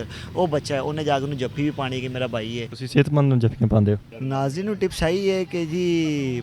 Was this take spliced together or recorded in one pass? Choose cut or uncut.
cut